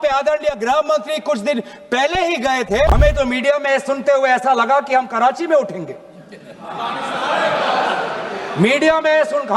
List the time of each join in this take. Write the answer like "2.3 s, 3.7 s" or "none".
2.9 s